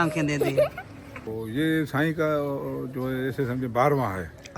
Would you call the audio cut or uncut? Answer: cut